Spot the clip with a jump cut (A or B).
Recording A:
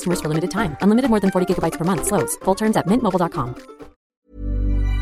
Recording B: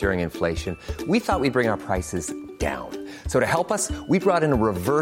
A